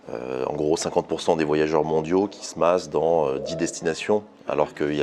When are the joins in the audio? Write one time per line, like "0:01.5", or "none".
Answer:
none